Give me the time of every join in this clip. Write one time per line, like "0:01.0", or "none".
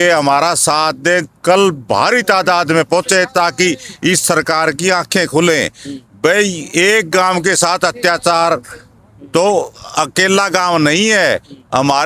none